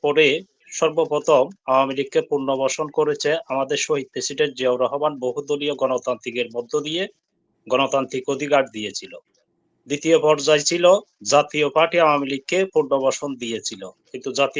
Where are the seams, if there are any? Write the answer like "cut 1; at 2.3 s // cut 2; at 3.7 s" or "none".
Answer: none